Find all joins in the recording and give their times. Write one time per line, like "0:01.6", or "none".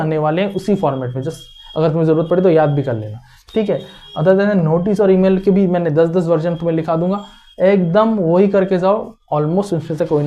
none